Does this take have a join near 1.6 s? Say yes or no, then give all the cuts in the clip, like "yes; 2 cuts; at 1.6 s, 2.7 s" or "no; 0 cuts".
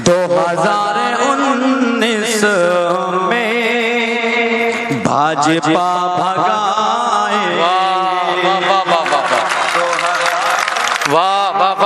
no; 0 cuts